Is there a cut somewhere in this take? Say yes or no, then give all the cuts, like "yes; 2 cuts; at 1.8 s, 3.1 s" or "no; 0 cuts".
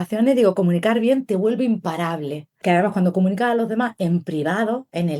yes; 1 cut; at 2.6 s